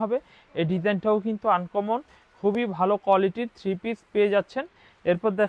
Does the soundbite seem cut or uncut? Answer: uncut